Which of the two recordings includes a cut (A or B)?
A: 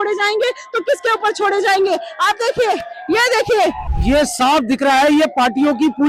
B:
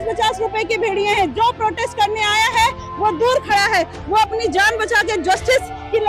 A